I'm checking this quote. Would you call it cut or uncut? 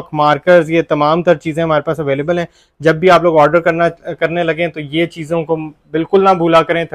uncut